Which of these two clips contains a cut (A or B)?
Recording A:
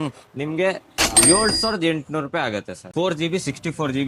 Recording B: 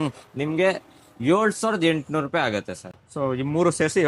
A